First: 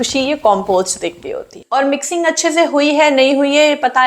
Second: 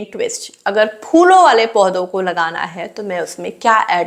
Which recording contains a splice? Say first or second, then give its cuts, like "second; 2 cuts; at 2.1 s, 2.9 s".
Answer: first; 1 cut; at 1.5 s